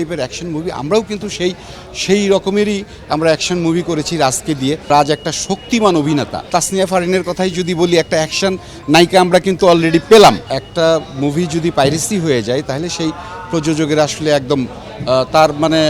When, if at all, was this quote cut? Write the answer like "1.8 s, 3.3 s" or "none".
4.9 s, 6.5 s, 10.6 s

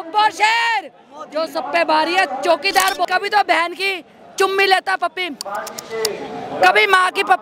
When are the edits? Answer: 3.0 s

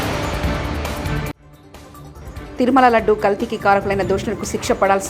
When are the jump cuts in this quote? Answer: 1.3 s

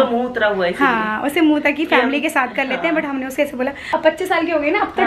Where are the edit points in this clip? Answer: 3.8 s

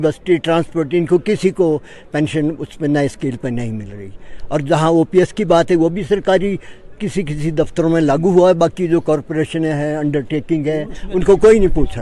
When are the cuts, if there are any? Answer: none

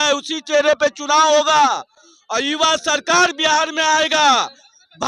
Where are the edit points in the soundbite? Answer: none

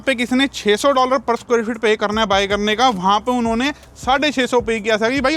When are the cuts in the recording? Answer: none

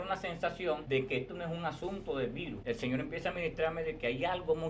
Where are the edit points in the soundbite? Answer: 0.8 s, 2.5 s

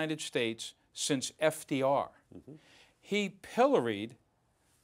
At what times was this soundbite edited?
none

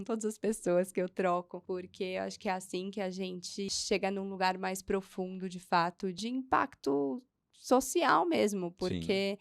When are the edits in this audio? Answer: 1.5 s, 3.7 s, 6.2 s

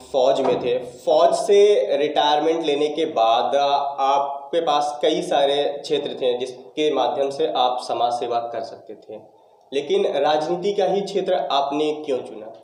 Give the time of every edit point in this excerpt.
none

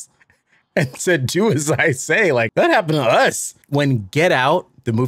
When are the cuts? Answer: 2.5 s, 3.5 s

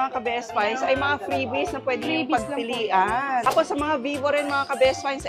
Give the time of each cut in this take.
3.4 s

